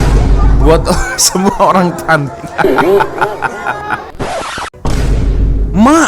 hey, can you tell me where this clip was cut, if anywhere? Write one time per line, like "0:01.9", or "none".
0:04.1

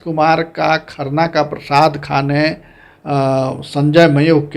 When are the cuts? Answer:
none

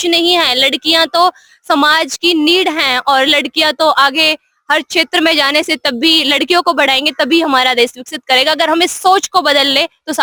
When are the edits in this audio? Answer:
none

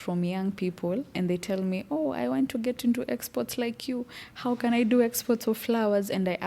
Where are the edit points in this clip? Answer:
0:01.1

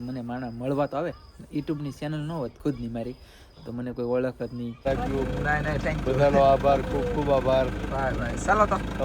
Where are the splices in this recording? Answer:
0:04.8

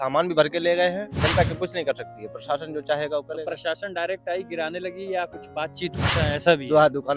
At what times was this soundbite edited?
0:01.1
0:05.9

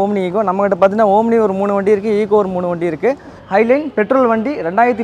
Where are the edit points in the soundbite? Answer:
0:03.4

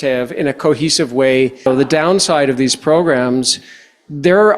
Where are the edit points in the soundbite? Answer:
0:01.7

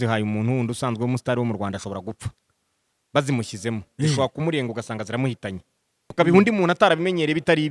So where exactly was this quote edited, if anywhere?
0:06.1

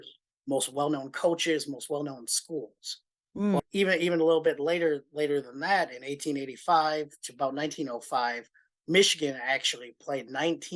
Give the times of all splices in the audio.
0:03.6

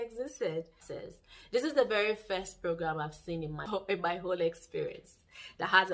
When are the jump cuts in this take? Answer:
0:00.9
0:03.7

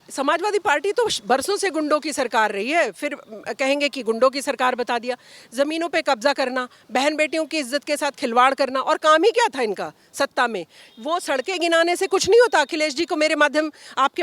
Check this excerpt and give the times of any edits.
none

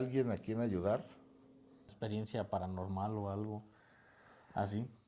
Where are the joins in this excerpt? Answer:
0:01.9

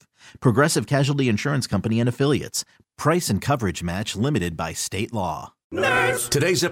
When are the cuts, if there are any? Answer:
0:05.5

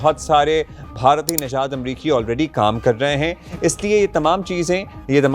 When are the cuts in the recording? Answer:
0:03.4

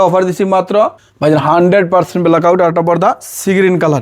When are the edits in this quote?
0:01.0

